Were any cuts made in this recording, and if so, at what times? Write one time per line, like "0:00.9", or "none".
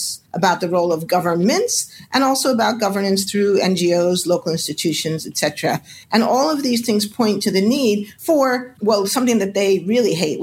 none